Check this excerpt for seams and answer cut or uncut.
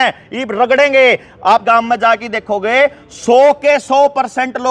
cut